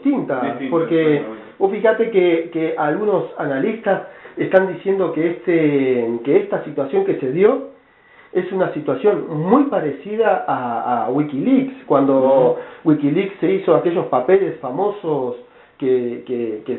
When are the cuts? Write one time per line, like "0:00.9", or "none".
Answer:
none